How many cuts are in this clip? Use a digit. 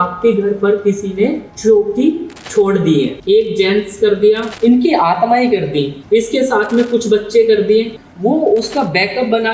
6